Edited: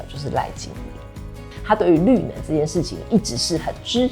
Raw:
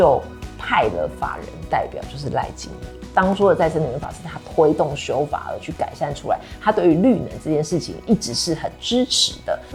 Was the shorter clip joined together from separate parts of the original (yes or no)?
yes